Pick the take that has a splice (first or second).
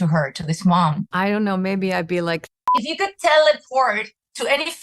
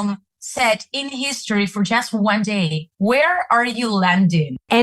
first